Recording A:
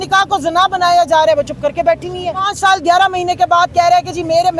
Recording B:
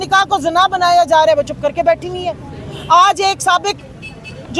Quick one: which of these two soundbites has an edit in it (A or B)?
A